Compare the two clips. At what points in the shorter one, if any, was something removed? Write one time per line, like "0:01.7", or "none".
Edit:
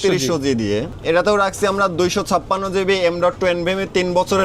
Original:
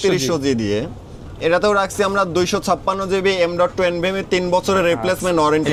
0:00.9